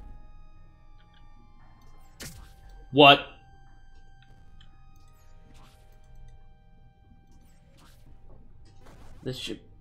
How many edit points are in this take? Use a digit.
1